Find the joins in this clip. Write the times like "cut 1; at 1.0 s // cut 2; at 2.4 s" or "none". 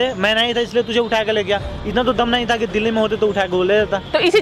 none